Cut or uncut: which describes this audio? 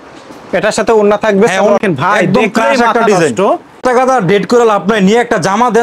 cut